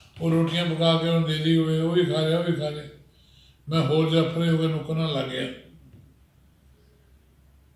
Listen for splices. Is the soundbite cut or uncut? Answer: uncut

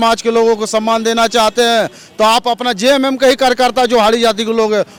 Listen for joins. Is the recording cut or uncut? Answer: uncut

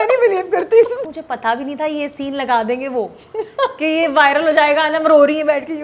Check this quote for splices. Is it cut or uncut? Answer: cut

